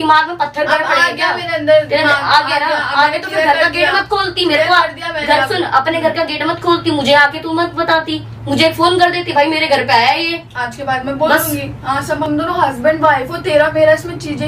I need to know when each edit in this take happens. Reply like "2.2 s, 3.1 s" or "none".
12.2 s

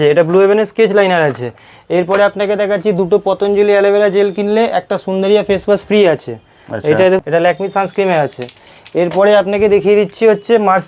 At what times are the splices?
7.2 s

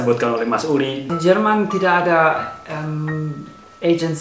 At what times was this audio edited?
1.1 s

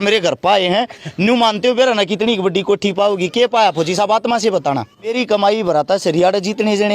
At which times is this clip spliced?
5.1 s

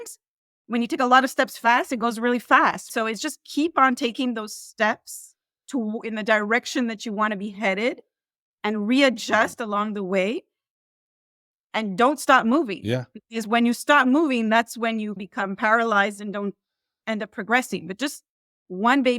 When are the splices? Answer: none

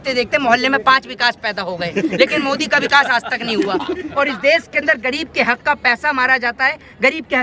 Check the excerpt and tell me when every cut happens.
4.1 s

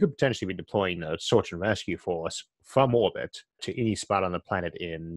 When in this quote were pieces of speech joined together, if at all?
3.6 s

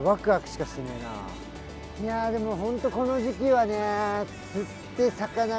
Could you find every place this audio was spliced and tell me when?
1.4 s

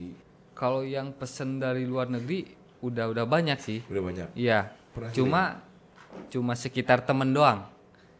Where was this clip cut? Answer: none

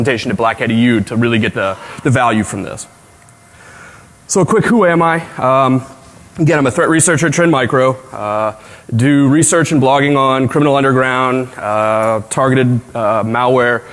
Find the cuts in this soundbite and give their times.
1.2 s

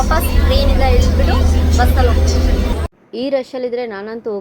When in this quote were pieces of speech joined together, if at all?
2.7 s

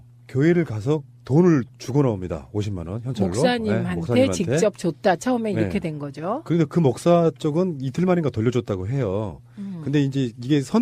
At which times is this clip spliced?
none

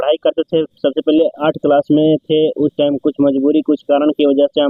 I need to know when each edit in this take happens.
none

